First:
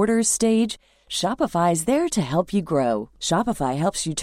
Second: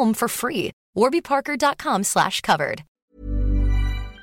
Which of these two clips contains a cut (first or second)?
second